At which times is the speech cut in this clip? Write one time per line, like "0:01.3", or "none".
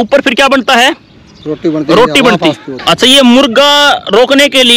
0:02.7